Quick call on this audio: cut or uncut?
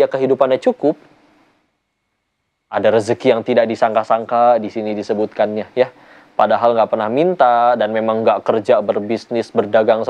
uncut